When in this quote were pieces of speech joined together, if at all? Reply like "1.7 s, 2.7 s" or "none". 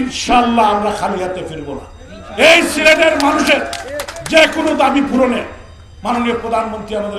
none